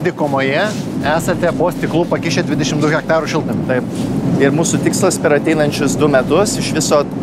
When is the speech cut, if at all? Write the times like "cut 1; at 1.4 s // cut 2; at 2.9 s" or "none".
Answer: cut 1; at 1.6 s // cut 2; at 4.2 s